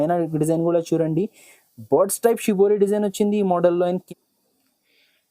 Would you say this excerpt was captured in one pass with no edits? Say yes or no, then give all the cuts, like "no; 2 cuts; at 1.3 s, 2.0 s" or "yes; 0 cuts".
no; 1 cut; at 4.0 s